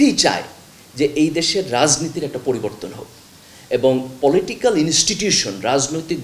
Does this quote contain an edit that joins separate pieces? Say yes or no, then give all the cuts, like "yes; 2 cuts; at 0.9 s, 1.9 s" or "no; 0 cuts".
no; 0 cuts